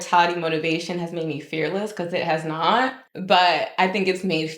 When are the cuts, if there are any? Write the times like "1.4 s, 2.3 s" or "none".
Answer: 3.1 s